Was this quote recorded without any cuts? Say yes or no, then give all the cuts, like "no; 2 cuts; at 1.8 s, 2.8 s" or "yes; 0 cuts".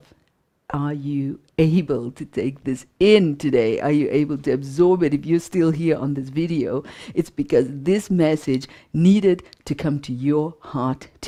yes; 0 cuts